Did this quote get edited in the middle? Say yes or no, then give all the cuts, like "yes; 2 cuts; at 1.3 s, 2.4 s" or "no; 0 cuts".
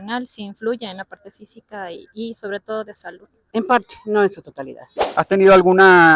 yes; 2 cuts; at 3.4 s, 5.0 s